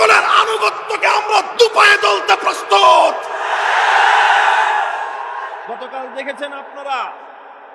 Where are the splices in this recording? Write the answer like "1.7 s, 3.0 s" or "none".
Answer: 5.6 s